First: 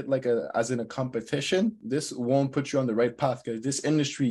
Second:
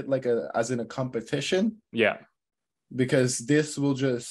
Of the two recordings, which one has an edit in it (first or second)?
first